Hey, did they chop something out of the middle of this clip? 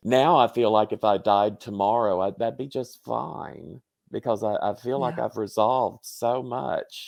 no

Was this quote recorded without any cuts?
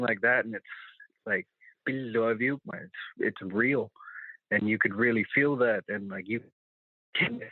yes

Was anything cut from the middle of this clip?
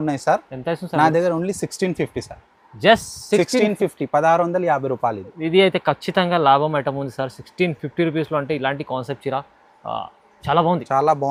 no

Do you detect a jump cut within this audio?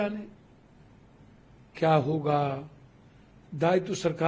no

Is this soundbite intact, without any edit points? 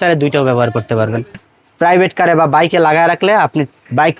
no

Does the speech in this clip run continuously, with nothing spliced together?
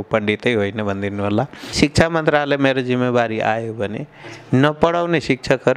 no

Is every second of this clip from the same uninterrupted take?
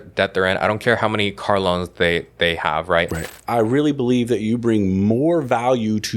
no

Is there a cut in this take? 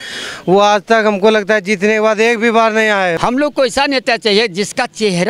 yes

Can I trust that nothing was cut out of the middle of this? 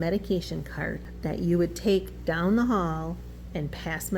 no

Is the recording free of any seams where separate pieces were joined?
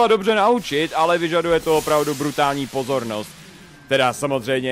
no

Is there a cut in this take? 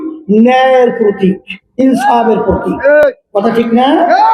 no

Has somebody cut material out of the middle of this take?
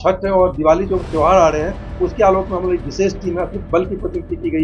no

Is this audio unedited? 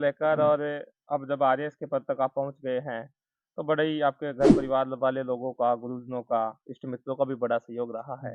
yes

